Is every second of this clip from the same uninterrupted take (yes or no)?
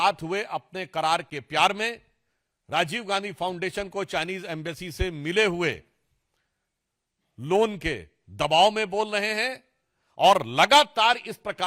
yes